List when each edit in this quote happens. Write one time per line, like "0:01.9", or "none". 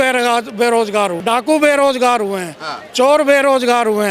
0:01.2